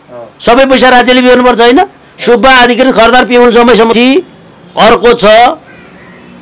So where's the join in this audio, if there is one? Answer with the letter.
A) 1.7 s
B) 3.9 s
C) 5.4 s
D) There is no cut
B